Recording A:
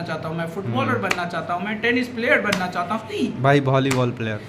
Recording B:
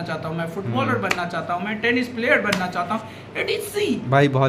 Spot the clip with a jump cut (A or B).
A